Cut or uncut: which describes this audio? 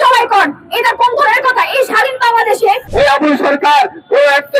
cut